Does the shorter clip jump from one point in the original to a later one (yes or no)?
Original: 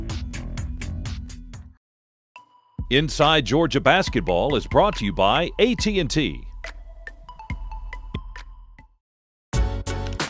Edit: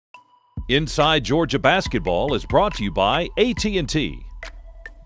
no